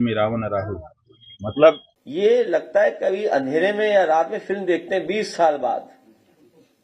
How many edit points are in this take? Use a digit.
1